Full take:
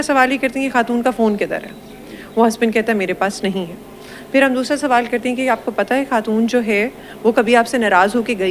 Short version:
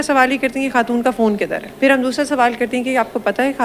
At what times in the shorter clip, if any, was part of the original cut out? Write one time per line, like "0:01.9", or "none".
0:01.6